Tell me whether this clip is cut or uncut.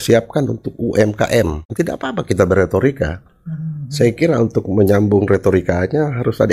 cut